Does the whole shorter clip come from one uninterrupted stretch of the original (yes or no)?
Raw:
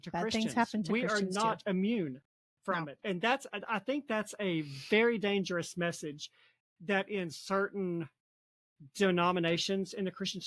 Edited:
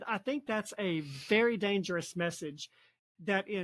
yes